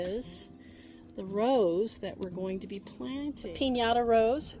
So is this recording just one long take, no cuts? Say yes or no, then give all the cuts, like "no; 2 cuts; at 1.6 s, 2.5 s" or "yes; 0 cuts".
no; 1 cut; at 3.4 s